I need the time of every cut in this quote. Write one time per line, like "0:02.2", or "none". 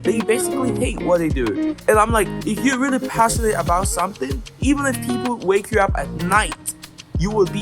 none